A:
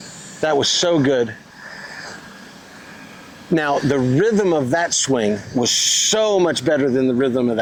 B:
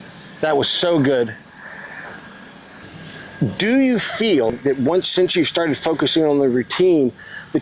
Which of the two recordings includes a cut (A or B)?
B